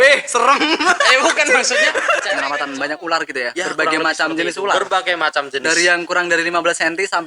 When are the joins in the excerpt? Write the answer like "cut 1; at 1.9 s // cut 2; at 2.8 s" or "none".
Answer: cut 1; at 2.4 s